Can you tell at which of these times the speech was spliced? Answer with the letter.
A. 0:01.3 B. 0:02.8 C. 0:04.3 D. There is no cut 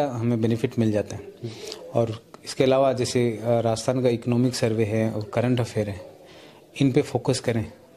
D